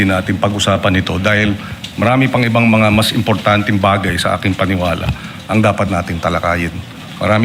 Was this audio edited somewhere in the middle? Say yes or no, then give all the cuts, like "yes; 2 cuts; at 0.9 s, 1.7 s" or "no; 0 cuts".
no; 0 cuts